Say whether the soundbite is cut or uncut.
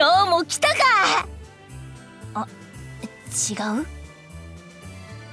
cut